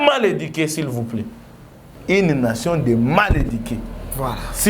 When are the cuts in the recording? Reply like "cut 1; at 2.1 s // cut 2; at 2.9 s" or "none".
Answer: cut 1; at 1.9 s